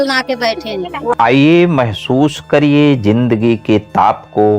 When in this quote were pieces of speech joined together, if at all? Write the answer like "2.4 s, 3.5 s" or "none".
1.1 s